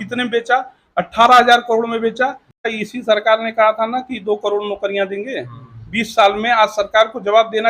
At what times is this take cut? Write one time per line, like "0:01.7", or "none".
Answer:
0:02.7